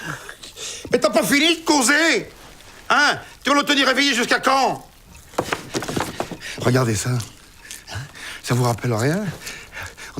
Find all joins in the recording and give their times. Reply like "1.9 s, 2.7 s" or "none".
7.0 s